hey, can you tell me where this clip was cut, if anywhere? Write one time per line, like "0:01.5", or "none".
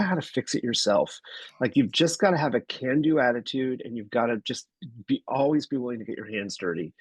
none